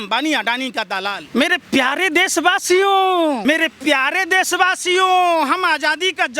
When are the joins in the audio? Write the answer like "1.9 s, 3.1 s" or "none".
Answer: 1.2 s, 3.4 s